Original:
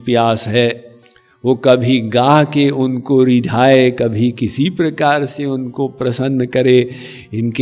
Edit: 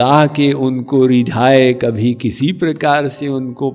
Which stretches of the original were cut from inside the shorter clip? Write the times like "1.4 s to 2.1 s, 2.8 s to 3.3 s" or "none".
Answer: none